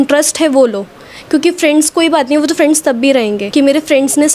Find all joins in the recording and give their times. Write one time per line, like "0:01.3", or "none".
0:03.4

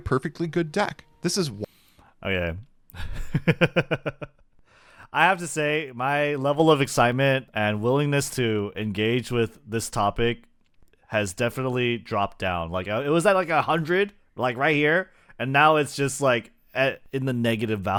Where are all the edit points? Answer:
none

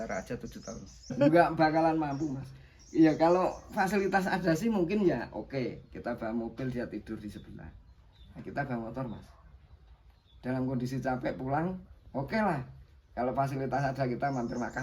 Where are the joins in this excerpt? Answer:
0:01.2

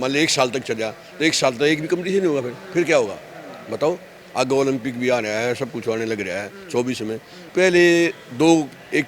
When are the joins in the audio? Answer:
0:07.5

